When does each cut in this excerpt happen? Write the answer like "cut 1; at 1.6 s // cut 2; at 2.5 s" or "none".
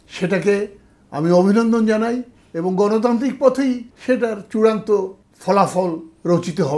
cut 1; at 3.9 s // cut 2; at 5.3 s